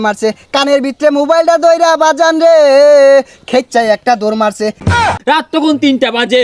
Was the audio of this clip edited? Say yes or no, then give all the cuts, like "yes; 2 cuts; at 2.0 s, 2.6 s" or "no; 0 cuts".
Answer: yes; 1 cut; at 5.0 s